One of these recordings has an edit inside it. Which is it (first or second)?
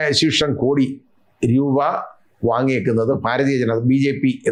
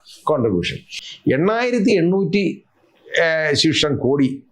second